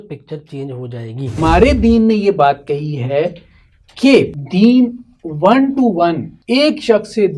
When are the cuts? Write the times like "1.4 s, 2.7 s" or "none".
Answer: 1.4 s, 4.4 s, 6.3 s